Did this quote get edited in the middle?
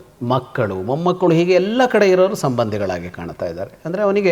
no; 0 cuts

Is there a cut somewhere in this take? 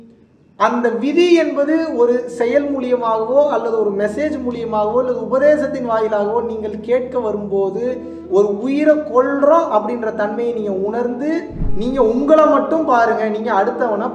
yes; 1 cut; at 11.6 s

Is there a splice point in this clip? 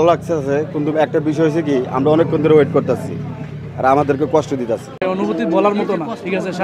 yes; 1 cut; at 5.0 s

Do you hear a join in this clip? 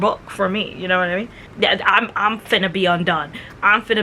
yes; 1 cut; at 1.4 s

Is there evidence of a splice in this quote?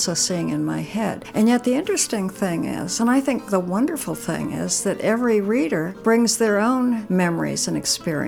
yes; 4 cuts; at 1.2 s, 3.4 s, 5.9 s, 7.0 s

